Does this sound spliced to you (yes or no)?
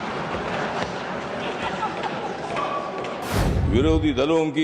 yes